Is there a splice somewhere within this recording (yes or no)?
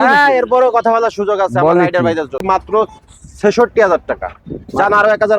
yes